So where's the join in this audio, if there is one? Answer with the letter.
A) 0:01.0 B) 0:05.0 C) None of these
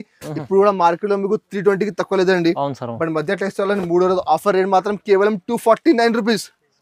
C